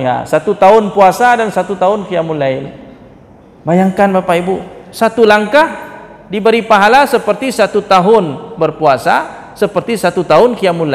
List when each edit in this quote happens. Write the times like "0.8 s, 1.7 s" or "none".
none